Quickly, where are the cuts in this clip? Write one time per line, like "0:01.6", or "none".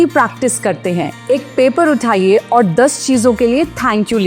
0:01.2